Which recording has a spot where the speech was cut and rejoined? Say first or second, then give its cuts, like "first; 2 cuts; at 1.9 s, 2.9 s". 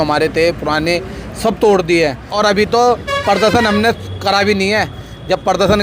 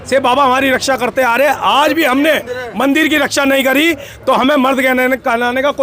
first; 1 cut; at 2.3 s